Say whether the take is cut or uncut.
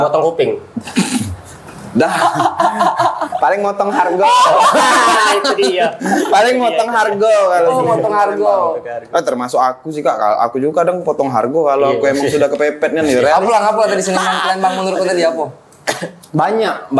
uncut